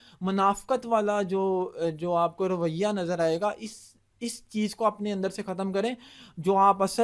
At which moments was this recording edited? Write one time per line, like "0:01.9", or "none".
none